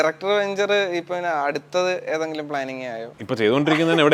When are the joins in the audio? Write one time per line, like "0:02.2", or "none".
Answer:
0:03.1